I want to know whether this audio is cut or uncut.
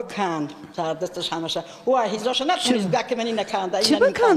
uncut